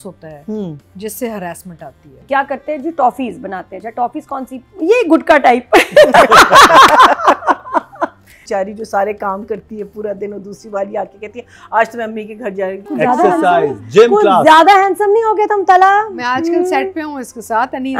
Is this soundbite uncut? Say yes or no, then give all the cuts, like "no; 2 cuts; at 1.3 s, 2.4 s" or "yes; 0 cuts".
no; 4 cuts; at 2.2 s, 4.6 s, 8.4 s, 12.8 s